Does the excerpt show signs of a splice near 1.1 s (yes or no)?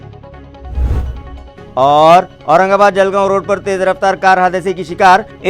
yes